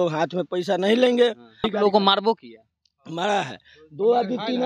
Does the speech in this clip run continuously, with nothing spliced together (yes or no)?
no